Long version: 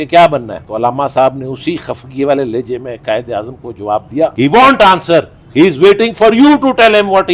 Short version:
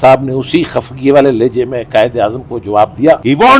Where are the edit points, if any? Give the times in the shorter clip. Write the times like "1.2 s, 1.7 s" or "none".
none